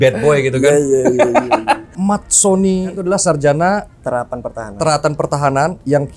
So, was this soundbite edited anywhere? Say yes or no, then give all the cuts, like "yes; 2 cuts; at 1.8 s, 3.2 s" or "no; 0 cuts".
yes; 2 cuts; at 1.9 s, 2.9 s